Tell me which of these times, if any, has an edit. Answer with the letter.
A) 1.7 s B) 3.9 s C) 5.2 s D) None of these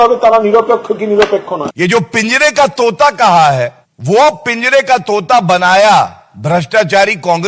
A